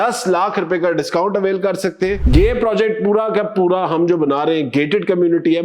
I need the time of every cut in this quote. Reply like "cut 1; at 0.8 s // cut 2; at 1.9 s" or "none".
cut 1; at 2.2 s